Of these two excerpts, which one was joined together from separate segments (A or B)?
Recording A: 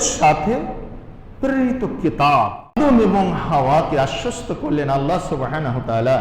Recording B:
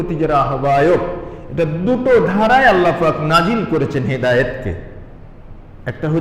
A